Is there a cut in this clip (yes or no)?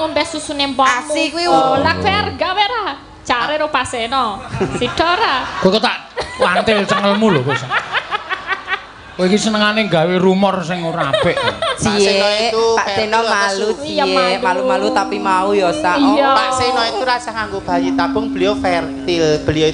yes